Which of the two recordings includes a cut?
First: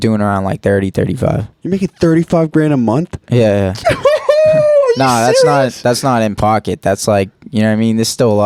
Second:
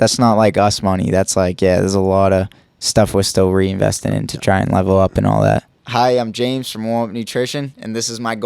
second; 1 cut; at 5.7 s

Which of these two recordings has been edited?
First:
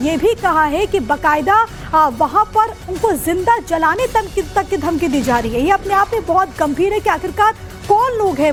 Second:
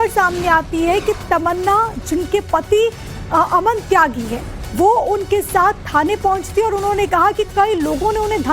second; 1 cut; at 7.2 s

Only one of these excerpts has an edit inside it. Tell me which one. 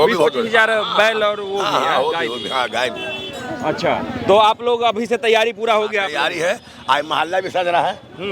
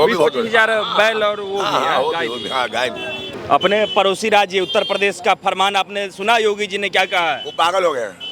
second; 1 cut; at 3.3 s

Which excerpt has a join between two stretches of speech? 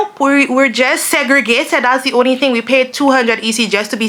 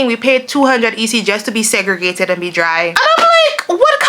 second; 1 cut; at 2.9 s

